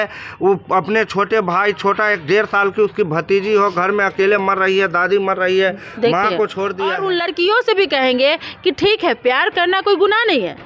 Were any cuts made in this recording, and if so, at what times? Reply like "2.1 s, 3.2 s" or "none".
6.9 s